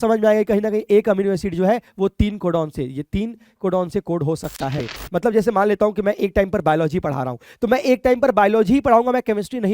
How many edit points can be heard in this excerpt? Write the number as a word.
one